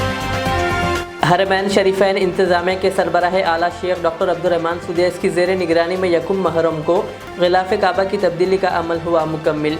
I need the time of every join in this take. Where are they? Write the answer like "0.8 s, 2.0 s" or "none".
1.1 s